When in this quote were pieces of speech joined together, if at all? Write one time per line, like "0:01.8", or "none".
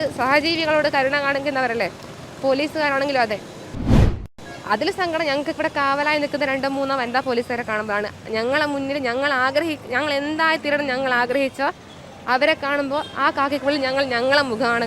0:04.1